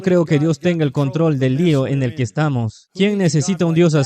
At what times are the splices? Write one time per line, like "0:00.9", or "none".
0:02.8

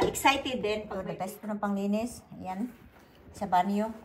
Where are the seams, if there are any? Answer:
0:00.9

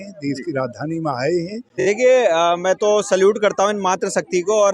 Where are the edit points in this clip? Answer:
0:01.7

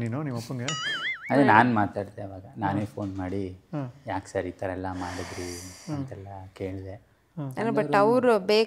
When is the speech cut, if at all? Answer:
none

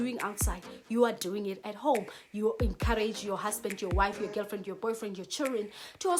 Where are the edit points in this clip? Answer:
none

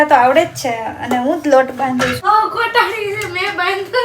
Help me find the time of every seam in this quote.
0:02.2

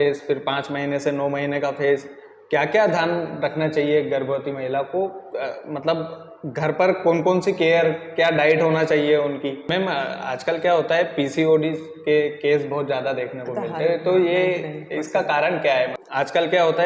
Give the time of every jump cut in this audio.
0:09.6
0:16.0

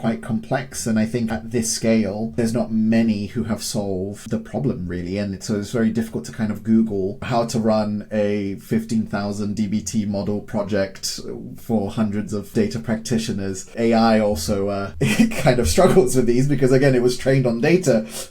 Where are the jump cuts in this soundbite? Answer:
0:01.3
0:02.3
0:04.2
0:07.2
0:12.5
0:13.7
0:14.9

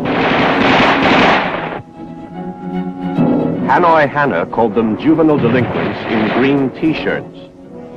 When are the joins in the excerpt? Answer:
0:02.0

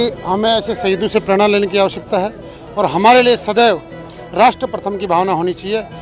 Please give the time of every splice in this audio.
none

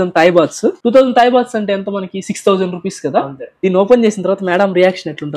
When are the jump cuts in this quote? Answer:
0:03.5

